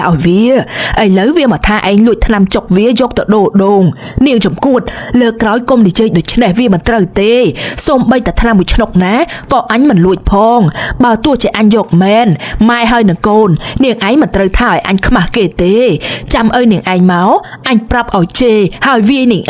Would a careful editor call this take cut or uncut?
uncut